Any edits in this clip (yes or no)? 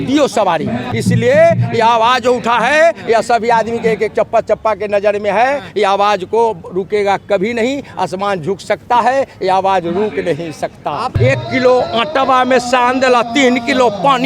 yes